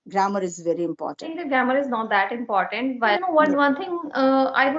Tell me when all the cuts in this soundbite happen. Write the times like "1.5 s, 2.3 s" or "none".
1.3 s, 3.2 s